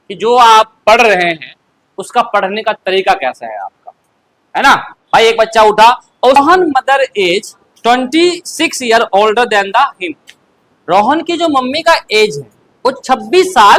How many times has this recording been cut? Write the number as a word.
one